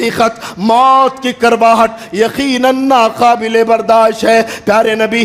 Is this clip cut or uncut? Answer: uncut